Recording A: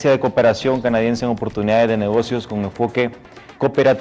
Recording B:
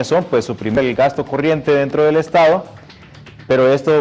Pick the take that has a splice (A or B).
A